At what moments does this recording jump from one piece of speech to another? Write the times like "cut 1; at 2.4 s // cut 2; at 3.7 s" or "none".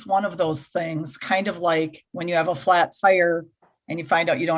cut 1; at 2.1 s